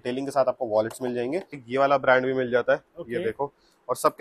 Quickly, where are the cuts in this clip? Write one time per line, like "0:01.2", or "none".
0:01.6